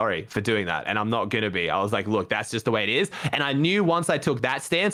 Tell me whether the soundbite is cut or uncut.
uncut